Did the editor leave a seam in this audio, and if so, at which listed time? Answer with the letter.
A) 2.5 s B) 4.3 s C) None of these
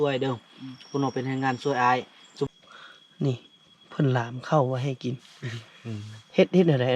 A